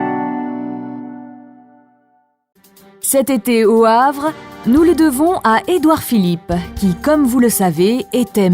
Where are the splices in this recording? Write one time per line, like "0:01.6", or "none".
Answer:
0:02.4